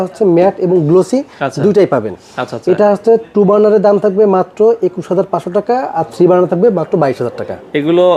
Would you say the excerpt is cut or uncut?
uncut